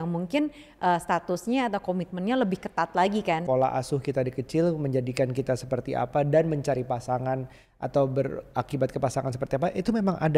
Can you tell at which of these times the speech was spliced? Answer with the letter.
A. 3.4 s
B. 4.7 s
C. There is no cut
A